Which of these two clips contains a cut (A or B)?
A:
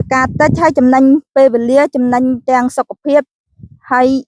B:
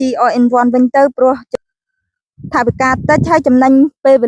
B